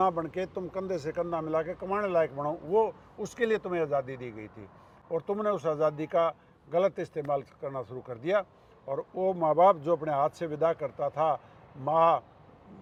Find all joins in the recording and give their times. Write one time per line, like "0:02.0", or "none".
none